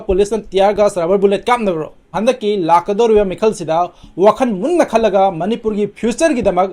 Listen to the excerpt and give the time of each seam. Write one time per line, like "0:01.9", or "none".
0:02.2